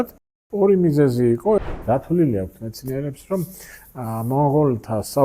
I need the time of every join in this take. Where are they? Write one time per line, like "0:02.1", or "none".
0:01.6